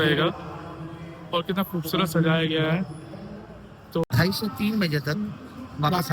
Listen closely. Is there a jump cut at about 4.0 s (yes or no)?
yes